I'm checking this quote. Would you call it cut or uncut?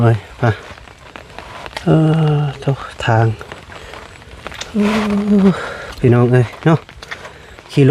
uncut